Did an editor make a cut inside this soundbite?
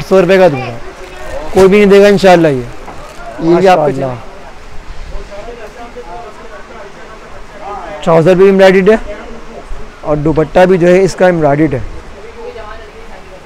yes; 1 cut; at 3.8 s

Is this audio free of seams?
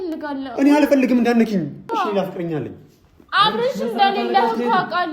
no; 1 cut; at 1.8 s

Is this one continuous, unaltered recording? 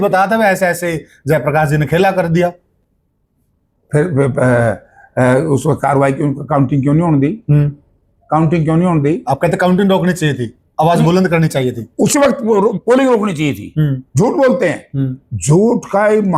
yes; 0 cuts

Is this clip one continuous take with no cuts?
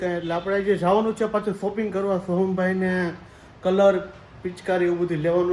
yes; 0 cuts

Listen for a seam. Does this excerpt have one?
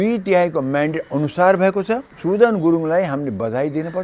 yes; 1 cut; at 2.1 s

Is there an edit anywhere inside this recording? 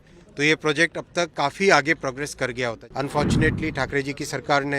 yes; 1 cut; at 2.8 s

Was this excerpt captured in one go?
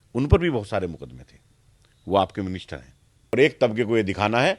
no; 1 cut; at 3.3 s

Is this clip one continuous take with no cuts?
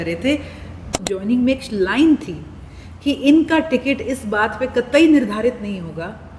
no; 1 cut; at 1.0 s

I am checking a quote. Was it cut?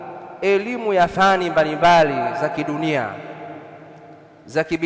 no; 0 cuts

